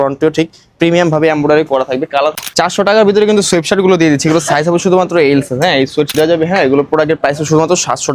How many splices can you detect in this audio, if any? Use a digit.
2